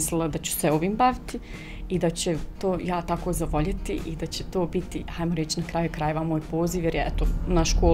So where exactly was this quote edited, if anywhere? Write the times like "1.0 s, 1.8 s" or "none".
none